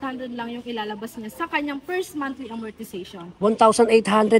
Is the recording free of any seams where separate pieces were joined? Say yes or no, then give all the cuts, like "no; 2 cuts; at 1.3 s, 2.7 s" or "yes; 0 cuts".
yes; 0 cuts